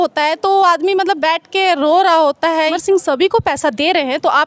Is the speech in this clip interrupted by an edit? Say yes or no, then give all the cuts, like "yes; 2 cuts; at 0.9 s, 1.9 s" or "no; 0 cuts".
yes; 1 cut; at 2.8 s